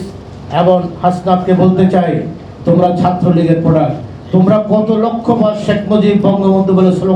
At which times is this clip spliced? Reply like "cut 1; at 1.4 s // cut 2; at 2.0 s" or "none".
none

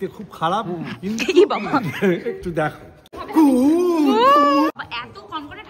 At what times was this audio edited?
cut 1; at 3.2 s // cut 2; at 4.7 s

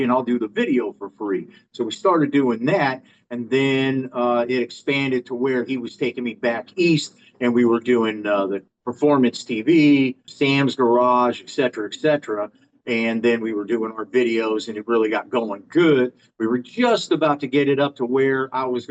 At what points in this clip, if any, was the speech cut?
cut 1; at 8.7 s // cut 2; at 10.2 s

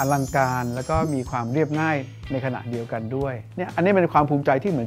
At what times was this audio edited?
cut 1; at 3.7 s

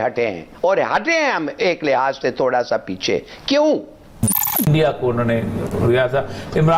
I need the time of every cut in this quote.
cut 1; at 4.3 s

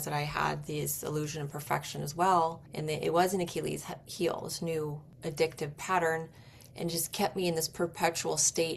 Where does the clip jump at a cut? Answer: cut 1; at 2.7 s // cut 2; at 5.1 s

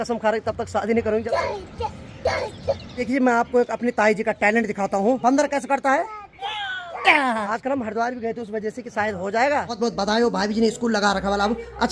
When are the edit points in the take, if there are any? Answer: cut 1; at 1.3 s // cut 2; at 3.0 s // cut 3; at 5.2 s // cut 4; at 7.5 s // cut 5; at 9.7 s

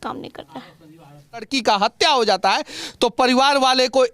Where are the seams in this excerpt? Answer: cut 1; at 1.5 s

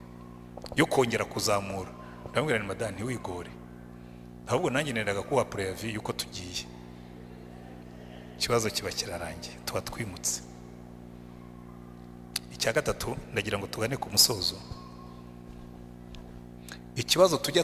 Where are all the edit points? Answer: none

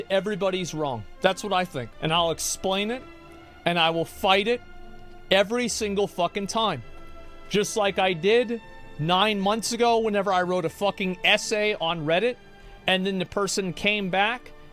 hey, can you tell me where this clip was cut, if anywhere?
cut 1; at 1.1 s // cut 2; at 1.9 s

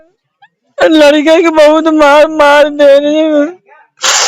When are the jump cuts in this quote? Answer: none

